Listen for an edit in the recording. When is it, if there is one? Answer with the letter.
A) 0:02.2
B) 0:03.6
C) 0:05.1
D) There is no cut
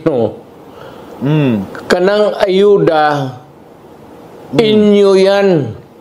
D